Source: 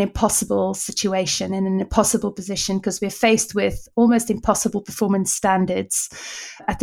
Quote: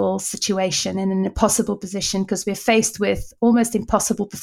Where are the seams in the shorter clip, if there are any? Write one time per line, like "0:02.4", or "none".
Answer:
none